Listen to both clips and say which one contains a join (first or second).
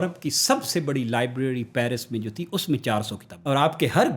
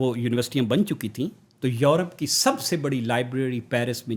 first